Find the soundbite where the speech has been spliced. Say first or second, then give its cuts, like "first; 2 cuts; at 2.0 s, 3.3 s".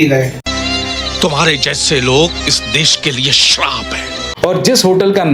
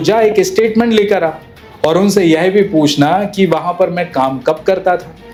first; 2 cuts; at 1.0 s, 4.2 s